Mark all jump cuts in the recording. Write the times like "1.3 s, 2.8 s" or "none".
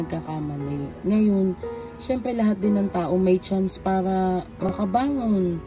4.7 s